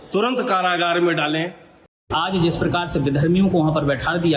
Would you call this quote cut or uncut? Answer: cut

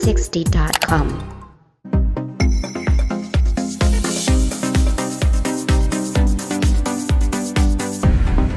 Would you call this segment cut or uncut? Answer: cut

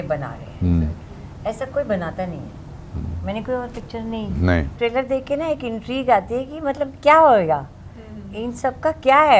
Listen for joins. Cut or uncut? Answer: cut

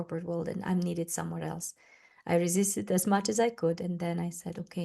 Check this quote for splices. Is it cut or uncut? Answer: uncut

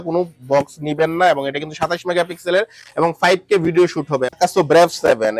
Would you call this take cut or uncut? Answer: cut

